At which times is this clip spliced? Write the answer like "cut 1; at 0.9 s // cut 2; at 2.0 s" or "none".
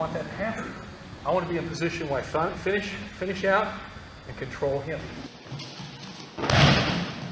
cut 1; at 5.1 s

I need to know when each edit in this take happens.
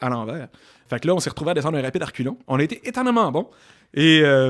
cut 1; at 0.9 s // cut 2; at 2.4 s

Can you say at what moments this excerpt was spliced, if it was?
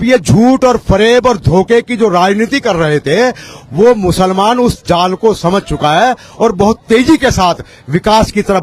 none

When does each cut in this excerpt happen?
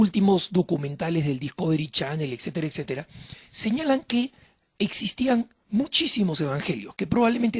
none

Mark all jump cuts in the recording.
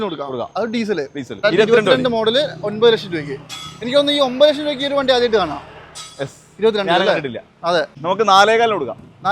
cut 1; at 1.4 s // cut 2; at 7.9 s

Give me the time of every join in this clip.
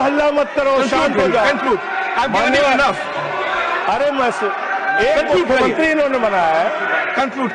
none

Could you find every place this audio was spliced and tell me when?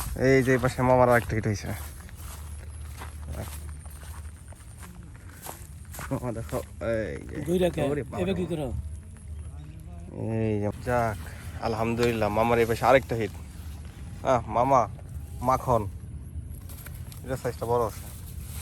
cut 1; at 10.7 s

